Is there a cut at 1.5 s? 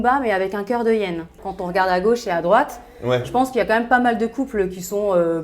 yes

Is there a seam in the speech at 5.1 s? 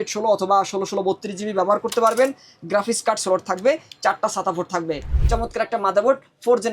yes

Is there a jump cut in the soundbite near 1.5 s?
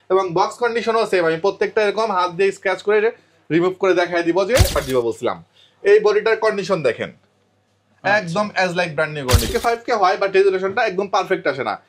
no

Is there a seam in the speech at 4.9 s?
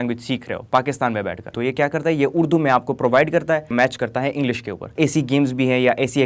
yes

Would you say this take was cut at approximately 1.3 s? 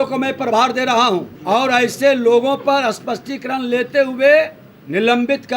yes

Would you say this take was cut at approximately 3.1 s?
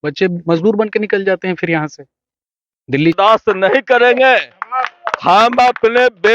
yes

